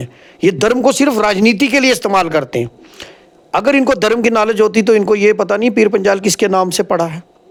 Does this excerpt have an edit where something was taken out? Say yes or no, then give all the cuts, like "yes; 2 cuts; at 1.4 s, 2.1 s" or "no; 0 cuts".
no; 0 cuts